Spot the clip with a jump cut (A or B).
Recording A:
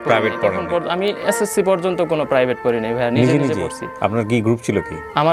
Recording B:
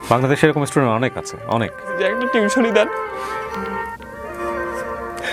B